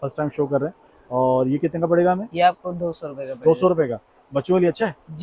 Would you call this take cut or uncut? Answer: uncut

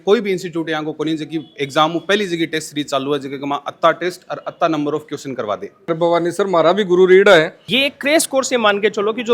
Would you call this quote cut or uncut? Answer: cut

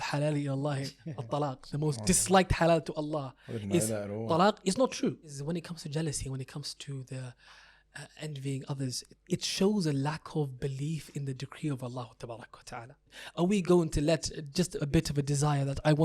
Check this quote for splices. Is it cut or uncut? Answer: cut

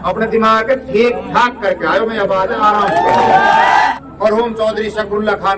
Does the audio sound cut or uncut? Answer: cut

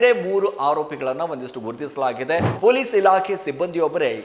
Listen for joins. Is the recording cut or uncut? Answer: cut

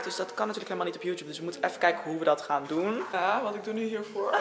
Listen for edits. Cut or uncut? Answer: cut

